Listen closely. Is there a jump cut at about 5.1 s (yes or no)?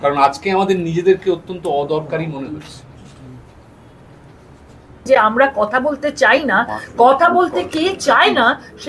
yes